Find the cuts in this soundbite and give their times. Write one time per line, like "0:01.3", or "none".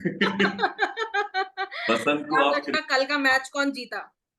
0:02.8

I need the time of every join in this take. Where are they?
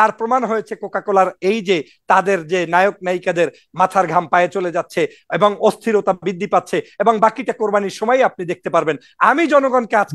none

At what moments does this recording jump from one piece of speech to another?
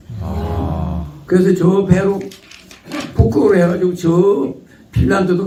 none

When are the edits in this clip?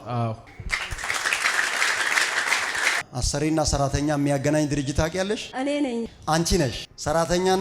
0:03.1

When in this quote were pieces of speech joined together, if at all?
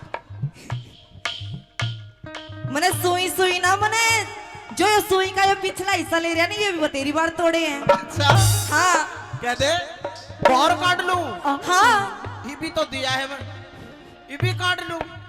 0:10.5

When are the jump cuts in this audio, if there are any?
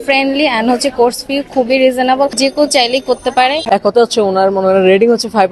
0:03.6

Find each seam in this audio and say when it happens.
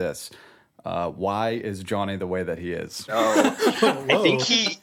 0:03.1

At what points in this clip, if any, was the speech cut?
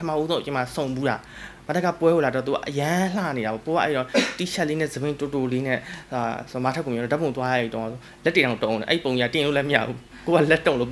none

